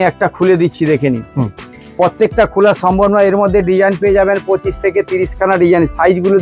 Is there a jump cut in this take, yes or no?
no